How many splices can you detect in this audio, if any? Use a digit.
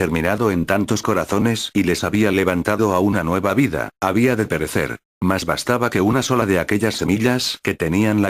1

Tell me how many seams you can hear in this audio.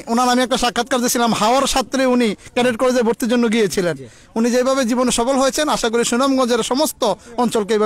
0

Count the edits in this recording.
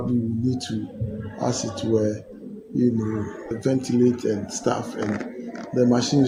0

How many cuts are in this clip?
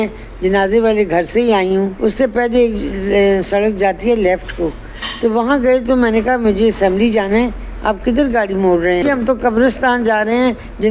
2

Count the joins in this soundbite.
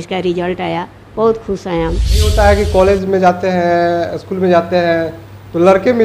1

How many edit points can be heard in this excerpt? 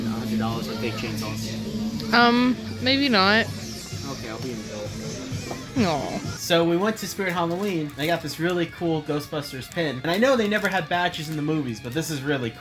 0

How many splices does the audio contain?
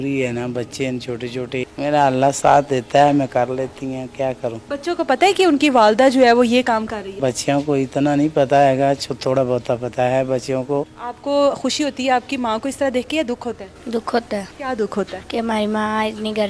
6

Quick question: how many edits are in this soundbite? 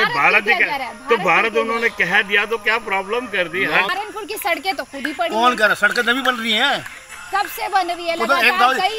1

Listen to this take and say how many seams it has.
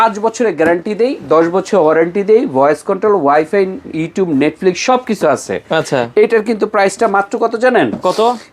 0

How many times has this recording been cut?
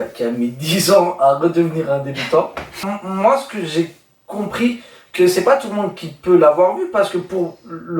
1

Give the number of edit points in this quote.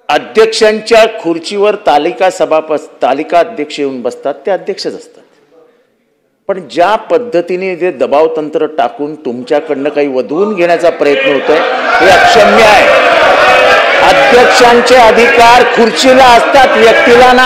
0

